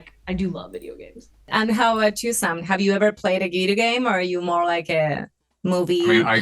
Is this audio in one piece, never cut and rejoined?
no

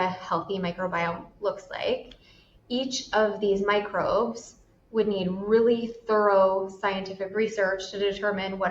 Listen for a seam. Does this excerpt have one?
no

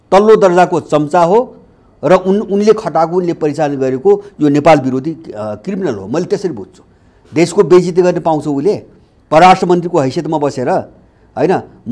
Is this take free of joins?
yes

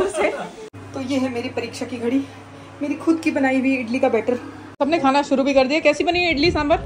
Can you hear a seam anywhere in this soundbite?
yes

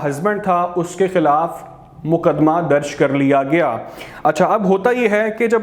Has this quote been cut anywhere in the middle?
no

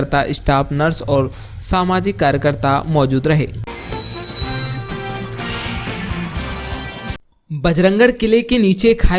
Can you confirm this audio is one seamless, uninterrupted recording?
no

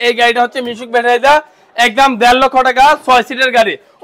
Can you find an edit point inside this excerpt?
no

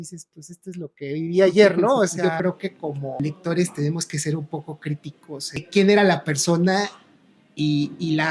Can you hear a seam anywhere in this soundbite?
yes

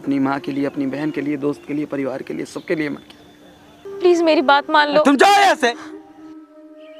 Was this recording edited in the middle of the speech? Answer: yes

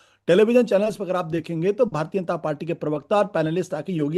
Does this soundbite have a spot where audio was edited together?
no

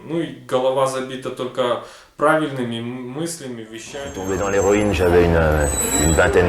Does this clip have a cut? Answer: yes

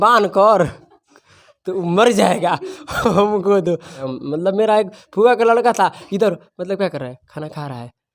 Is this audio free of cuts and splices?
no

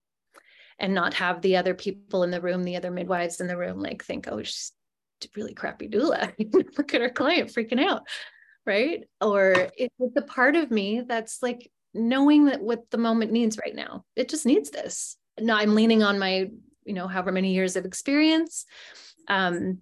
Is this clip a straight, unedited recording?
yes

